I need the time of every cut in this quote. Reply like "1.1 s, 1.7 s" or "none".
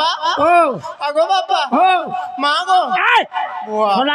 none